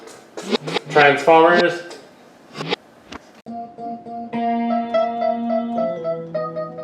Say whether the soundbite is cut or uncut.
cut